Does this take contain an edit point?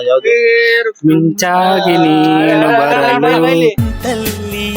yes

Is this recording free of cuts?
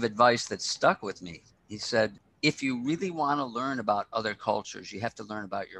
no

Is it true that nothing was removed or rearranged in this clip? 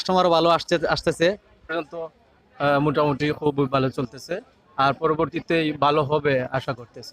no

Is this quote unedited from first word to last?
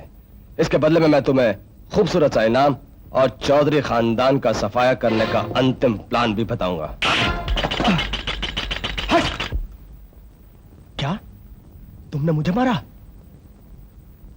no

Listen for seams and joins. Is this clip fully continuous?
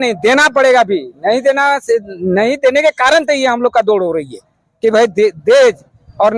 yes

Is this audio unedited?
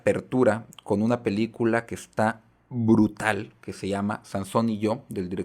yes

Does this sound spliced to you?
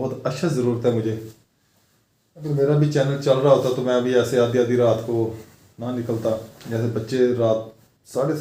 no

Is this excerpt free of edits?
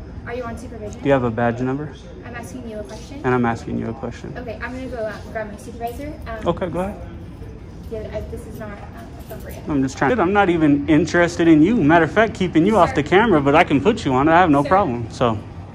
no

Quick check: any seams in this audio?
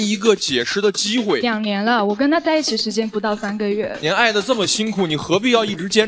yes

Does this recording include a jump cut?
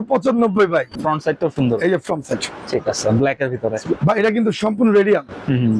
yes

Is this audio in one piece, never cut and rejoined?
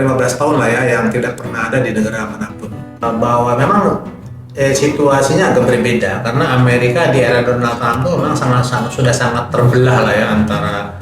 no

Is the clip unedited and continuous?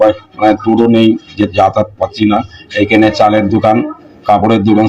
yes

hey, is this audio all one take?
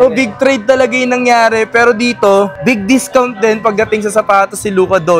yes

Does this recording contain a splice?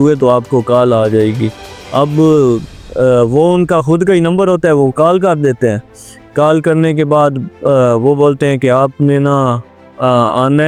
no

